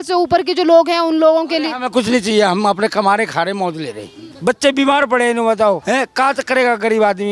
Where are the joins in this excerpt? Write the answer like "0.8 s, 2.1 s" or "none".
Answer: 4.2 s, 5.8 s